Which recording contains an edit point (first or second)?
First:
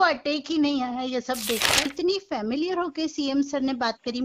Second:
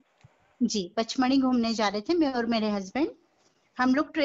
first